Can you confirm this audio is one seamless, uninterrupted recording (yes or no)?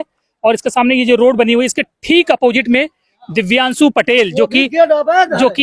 yes